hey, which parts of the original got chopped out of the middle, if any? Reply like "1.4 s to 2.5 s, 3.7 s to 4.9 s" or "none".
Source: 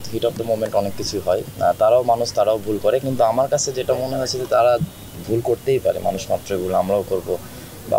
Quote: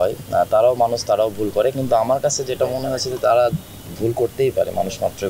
none